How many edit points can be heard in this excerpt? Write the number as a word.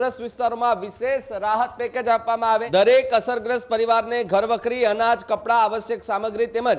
one